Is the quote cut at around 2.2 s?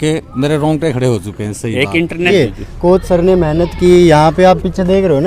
yes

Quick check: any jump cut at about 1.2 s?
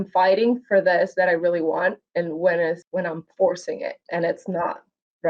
no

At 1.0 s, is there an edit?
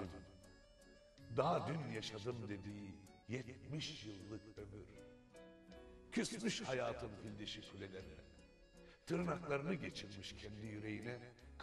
no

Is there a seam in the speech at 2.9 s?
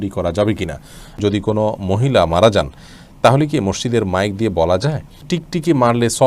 no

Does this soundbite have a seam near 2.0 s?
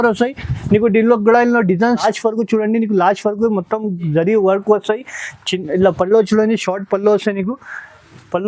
yes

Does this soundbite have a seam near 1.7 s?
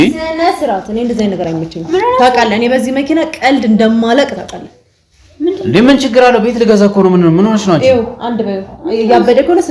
no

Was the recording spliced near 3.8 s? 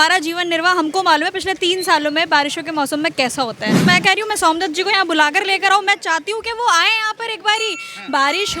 yes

